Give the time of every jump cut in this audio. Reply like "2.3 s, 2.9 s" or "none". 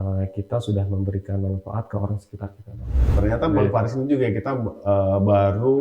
3.2 s

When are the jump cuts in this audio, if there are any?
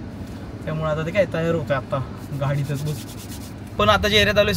3.6 s

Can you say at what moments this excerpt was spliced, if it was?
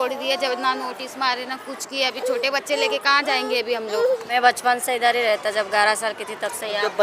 4.2 s

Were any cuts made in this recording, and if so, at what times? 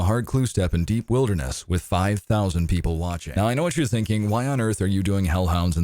3.2 s

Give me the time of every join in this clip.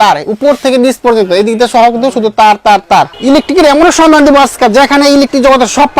3.1 s

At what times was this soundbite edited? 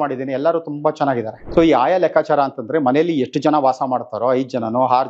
1.4 s

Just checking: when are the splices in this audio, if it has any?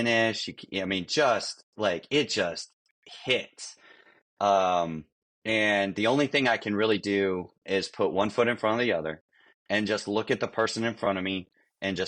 none

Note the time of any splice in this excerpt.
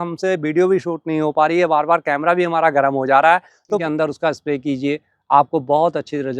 3.8 s

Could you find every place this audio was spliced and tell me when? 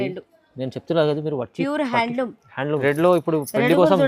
2.7 s

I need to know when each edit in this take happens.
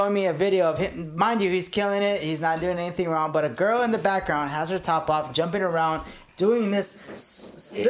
none

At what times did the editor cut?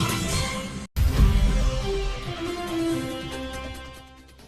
0.9 s

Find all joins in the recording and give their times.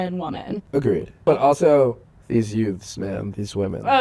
1.0 s, 2.1 s

